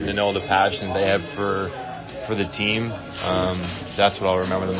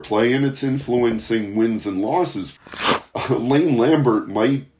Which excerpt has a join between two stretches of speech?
second; 1 cut; at 2.6 s

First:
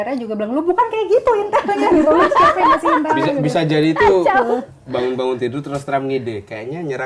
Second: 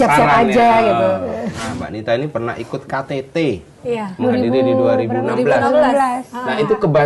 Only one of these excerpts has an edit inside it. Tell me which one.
second; 1 cut; at 1.7 s

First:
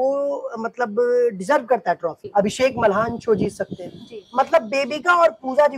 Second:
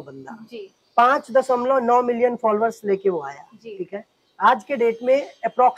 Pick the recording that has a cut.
first; 1 cut; at 2.2 s

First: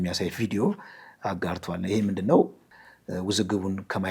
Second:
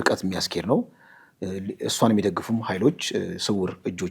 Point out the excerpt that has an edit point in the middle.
first; 1 cut; at 2.6 s

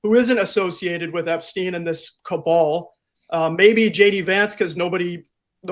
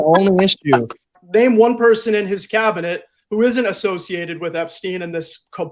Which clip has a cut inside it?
second; 1 cut; at 1.1 s

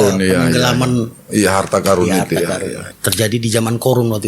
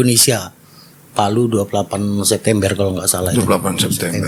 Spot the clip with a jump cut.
first; 1 cut; at 2.9 s

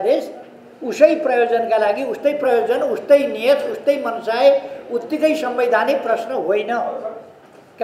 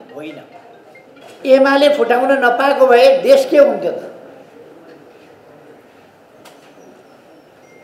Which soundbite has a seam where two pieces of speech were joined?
second; 1 cut; at 1.3 s

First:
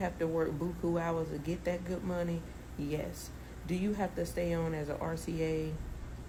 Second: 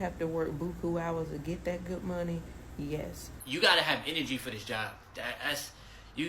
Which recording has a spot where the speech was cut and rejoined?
second; 1 cut; at 3.3 s

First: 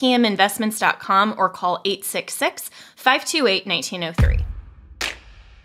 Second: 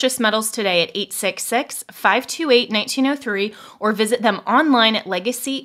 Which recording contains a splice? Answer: first; 1 cut; at 4.1 s

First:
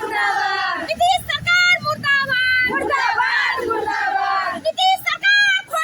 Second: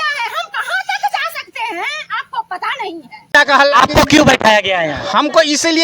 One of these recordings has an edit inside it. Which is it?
second; 1 cut; at 3.3 s

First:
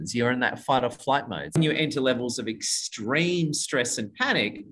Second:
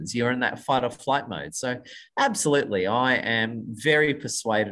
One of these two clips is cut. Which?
first; 1 cut; at 1.6 s

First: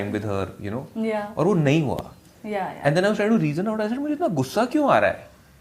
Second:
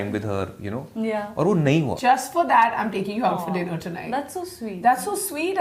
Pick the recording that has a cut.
second; 1 cut; at 2.0 s

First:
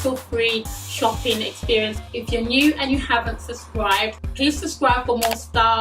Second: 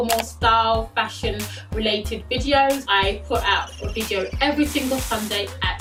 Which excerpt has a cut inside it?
first; 2 cuts; at 2.0 s, 4.2 s

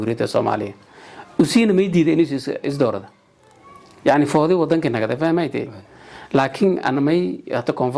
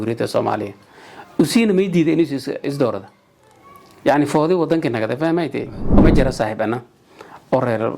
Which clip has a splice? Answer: second; 1 cut; at 6.0 s

